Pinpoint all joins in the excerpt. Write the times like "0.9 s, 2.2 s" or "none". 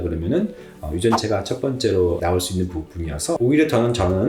3.4 s

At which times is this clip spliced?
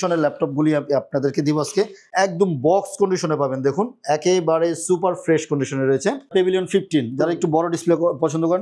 2.0 s, 6.3 s

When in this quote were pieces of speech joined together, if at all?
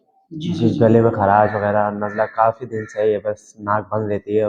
none

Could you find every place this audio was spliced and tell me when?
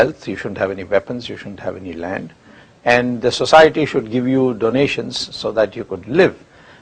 2.2 s

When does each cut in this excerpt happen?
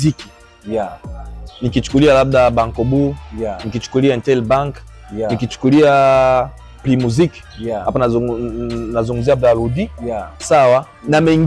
none

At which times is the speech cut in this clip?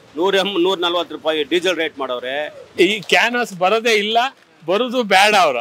2.7 s

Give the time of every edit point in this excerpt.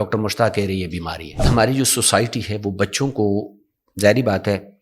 1.4 s

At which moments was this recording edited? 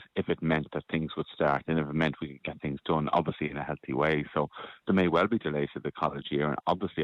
none

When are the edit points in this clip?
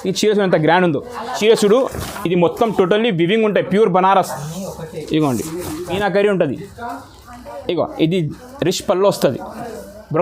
1.3 s, 5.9 s

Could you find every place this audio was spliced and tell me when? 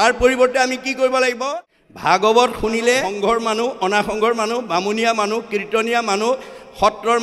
1.4 s, 3.1 s

